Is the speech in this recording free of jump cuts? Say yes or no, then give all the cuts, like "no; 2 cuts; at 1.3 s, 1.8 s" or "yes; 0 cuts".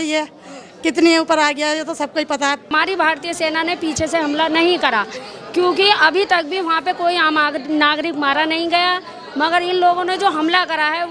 no; 1 cut; at 2.7 s